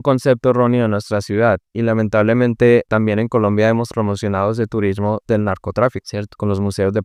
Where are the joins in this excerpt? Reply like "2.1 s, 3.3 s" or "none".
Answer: none